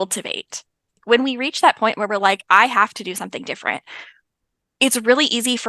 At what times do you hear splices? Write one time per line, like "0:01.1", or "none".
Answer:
0:01.0